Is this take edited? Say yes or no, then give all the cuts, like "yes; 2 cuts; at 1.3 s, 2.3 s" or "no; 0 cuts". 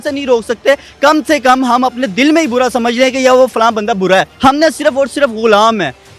yes; 1 cut; at 4.3 s